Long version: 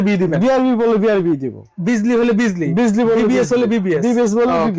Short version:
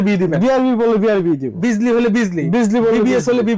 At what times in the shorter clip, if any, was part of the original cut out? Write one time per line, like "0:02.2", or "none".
0:01.5